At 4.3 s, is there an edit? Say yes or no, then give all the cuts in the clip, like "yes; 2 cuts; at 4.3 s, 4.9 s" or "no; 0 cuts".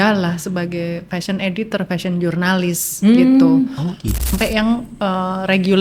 yes; 1 cut; at 4.3 s